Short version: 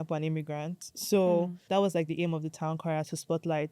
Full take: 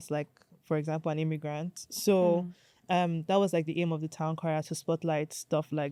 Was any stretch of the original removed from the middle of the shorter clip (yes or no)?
yes